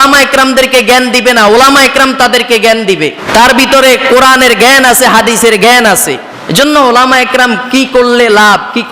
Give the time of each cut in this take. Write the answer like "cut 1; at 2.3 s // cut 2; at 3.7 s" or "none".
cut 1; at 3.2 s // cut 2; at 6.3 s